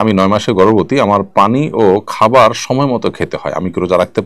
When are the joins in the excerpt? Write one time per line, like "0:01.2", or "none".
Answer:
none